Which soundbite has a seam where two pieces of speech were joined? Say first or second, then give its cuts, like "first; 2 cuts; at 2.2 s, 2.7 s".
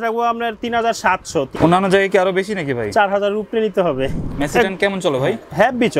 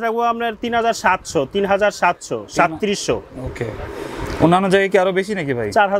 first; 2 cuts; at 1.5 s, 4.3 s